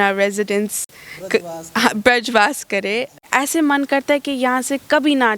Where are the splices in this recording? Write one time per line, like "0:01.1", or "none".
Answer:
0:03.2